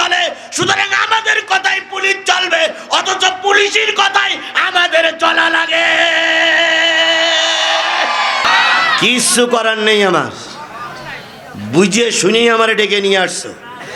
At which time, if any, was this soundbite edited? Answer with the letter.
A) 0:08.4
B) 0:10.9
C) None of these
A